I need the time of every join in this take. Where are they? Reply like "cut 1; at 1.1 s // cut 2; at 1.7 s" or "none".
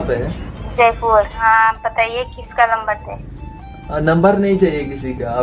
cut 1; at 1.4 s